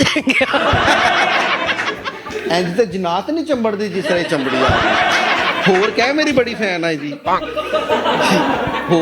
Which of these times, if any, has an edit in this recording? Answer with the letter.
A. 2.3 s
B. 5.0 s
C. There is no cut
A